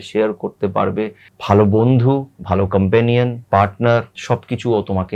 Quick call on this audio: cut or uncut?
cut